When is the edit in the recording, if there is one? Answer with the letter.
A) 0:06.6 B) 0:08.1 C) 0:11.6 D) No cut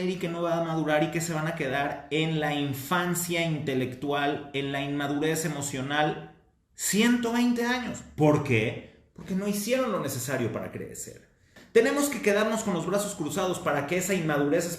C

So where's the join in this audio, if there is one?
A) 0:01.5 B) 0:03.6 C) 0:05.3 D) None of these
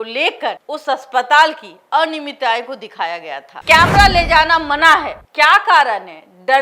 B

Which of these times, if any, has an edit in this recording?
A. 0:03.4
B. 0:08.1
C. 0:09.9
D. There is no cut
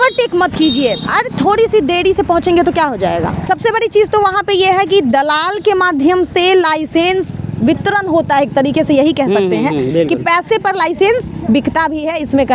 A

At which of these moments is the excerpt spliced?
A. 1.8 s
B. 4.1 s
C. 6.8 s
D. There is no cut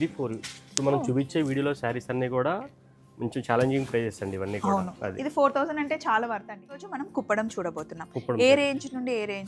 C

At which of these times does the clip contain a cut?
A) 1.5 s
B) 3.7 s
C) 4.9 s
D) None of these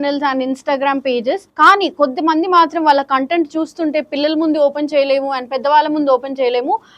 A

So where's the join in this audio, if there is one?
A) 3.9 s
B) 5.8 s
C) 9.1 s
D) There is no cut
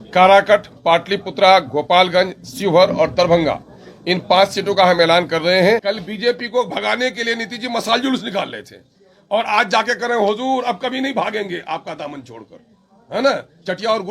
B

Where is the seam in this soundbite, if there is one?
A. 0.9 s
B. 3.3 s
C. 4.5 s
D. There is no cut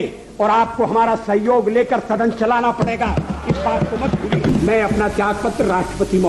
C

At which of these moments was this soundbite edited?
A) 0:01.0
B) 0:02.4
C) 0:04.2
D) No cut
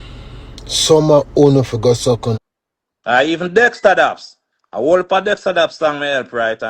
B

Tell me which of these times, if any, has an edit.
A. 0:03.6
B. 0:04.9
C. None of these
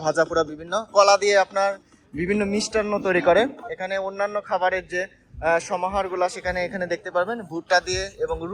A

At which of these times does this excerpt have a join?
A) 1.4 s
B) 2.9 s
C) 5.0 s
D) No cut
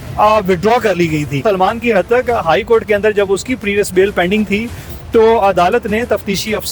A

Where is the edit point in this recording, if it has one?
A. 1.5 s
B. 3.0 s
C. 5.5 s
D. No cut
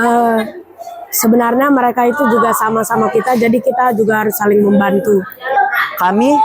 C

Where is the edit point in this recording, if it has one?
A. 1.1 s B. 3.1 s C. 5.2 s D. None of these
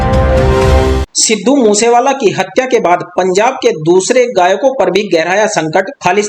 A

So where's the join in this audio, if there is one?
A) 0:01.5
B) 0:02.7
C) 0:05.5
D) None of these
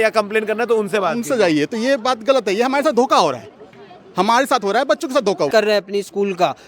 C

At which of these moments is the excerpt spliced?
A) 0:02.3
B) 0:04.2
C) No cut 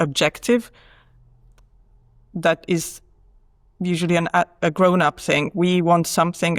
C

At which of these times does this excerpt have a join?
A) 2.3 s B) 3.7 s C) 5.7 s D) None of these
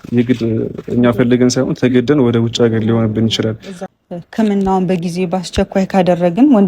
B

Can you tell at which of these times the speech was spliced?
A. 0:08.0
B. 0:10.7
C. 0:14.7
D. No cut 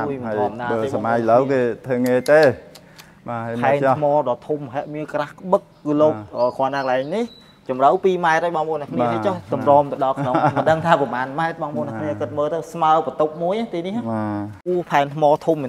C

